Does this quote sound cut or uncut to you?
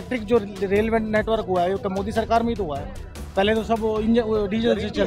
uncut